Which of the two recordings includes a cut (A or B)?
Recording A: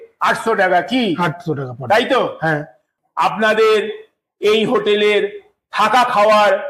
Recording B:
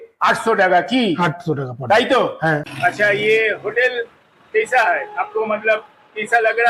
B